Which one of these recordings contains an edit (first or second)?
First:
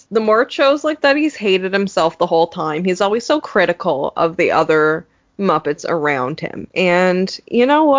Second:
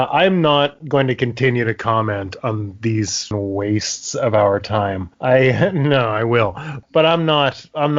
second